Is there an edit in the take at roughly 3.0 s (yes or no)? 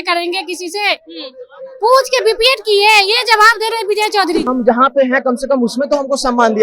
no